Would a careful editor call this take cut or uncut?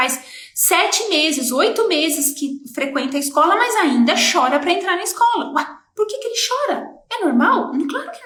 uncut